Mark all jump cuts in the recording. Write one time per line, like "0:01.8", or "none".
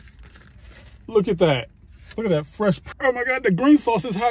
0:02.8